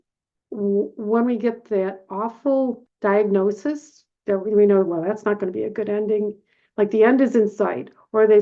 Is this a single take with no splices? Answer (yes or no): no